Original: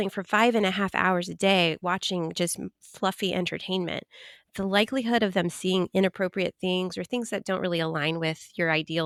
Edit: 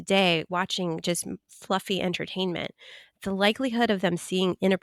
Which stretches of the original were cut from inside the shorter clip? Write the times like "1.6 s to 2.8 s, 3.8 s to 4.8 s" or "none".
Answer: none